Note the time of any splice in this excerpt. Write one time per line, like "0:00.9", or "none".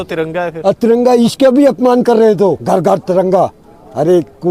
0:02.6